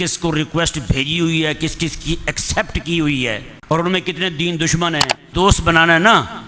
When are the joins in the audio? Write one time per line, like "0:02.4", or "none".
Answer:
0:03.5
0:05.3